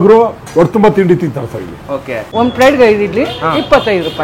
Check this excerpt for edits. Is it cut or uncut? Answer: cut